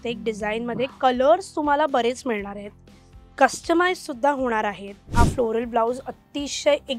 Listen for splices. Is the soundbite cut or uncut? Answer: cut